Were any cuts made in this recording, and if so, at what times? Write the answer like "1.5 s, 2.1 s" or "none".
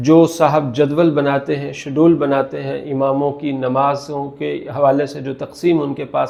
none